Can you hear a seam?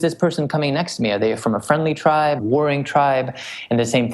yes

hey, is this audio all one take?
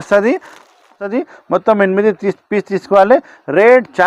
no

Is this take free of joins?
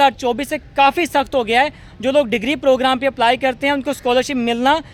yes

